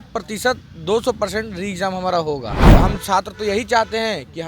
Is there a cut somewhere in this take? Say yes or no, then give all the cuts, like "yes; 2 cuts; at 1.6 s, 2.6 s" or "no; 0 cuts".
yes; 1 cut; at 2.7 s